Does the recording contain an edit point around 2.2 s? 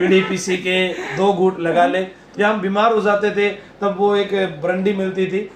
yes; 1 cut; at 2.2 s

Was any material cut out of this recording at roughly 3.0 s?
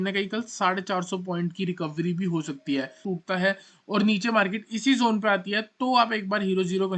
yes; 1 cut; at 3.0 s

